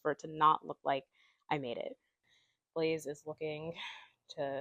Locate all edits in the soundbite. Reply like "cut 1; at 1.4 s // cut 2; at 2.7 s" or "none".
cut 1; at 2.2 s

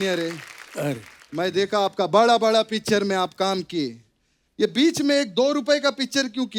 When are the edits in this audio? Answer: none

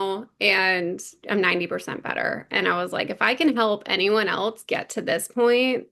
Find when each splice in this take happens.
none

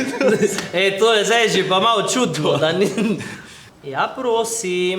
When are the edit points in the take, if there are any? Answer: none

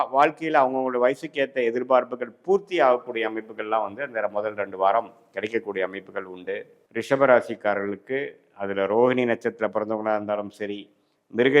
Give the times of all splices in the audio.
cut 1; at 6.8 s

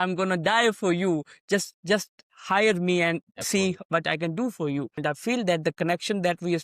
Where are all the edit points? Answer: cut 1; at 5.0 s

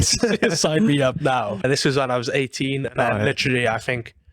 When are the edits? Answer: cut 1; at 1.6 s

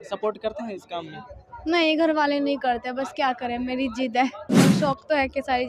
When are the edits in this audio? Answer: cut 1; at 4.5 s

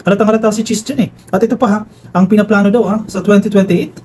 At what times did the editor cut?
cut 1; at 1.2 s

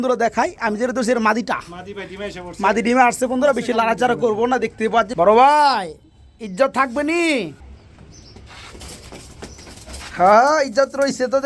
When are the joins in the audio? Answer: cut 1; at 5.1 s // cut 2; at 7.6 s

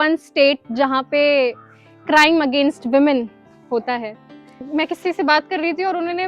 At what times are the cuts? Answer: cut 1; at 4.7 s

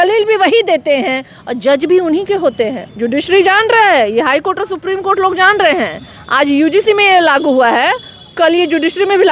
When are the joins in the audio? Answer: cut 1; at 2.9 s

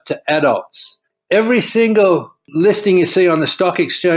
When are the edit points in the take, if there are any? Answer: cut 1; at 1.0 s

